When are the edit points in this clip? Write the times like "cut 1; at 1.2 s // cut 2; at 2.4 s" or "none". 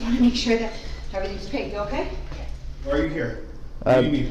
cut 1; at 2.9 s